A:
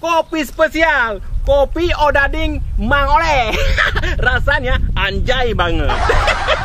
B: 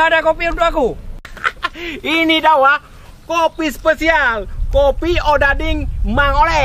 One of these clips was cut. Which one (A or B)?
B